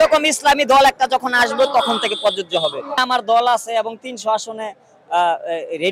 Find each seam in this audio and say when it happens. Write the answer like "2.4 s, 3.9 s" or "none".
2.9 s